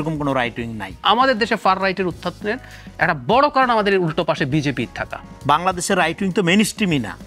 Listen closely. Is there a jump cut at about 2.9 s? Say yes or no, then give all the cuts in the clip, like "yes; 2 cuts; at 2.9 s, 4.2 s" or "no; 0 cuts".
no; 2 cuts; at 1.0 s, 5.3 s